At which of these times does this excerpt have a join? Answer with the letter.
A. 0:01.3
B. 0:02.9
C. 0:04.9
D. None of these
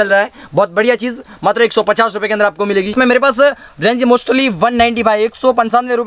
B